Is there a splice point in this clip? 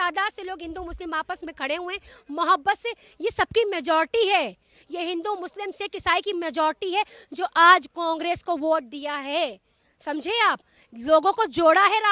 no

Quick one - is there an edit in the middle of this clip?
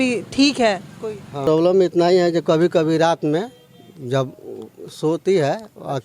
yes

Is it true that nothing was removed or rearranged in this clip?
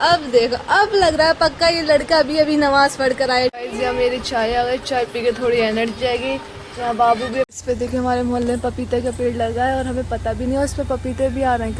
no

